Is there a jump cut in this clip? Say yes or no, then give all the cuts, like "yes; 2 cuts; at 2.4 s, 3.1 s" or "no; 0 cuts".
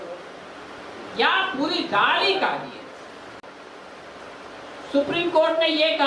yes; 1 cut; at 3.4 s